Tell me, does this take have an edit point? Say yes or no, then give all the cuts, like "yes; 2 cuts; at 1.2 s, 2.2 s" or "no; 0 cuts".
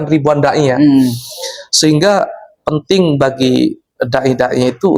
no; 0 cuts